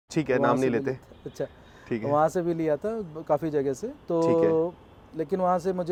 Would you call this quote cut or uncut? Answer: uncut